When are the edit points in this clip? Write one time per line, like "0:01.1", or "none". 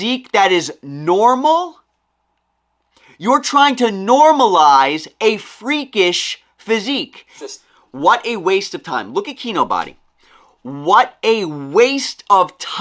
0:07.4